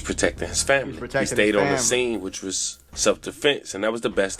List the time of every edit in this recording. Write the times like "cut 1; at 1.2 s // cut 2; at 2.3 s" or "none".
none